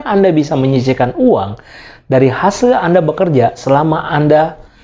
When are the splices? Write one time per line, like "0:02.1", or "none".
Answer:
none

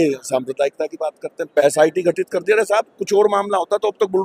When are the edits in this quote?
0:01.6

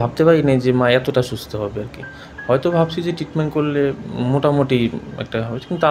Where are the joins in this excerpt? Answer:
none

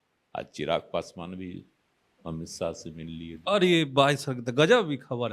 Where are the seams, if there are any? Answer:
none

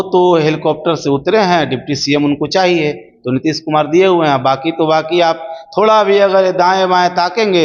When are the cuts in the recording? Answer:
none

